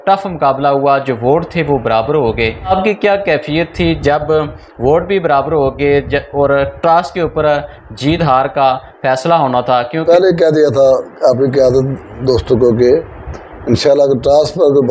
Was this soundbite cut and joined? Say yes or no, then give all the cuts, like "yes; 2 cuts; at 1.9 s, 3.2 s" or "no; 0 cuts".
yes; 2 cuts; at 2.7 s, 10.0 s